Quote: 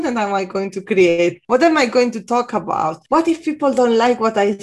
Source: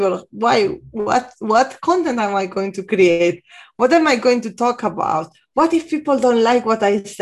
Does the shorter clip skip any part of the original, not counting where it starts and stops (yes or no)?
yes